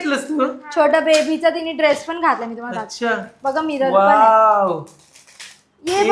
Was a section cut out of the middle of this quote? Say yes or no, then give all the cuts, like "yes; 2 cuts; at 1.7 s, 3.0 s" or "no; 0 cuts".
no; 0 cuts